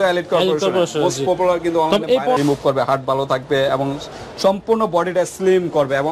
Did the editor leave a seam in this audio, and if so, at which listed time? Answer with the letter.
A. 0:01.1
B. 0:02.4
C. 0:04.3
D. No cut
B